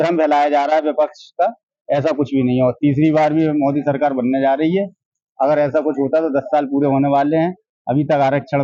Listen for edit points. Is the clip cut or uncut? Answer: uncut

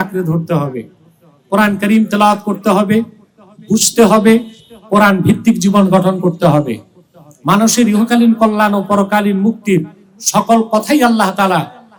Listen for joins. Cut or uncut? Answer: uncut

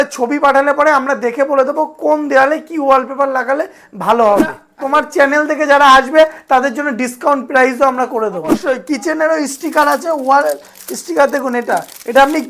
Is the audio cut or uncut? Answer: cut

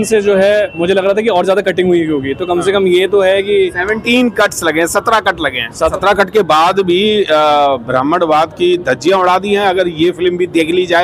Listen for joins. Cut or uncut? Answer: cut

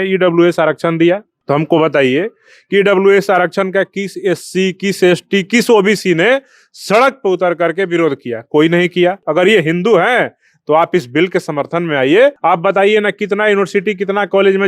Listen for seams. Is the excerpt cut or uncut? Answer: cut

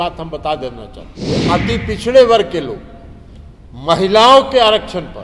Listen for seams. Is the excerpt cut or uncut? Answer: cut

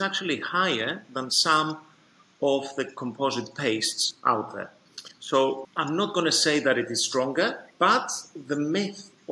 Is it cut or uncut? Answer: cut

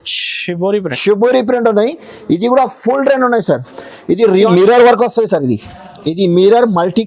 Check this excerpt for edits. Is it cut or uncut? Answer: cut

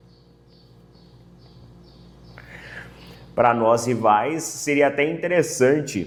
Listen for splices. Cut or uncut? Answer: uncut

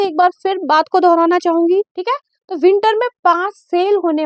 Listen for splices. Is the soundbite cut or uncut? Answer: cut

